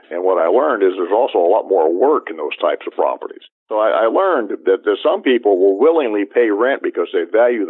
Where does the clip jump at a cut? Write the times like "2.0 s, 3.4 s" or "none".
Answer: 3.6 s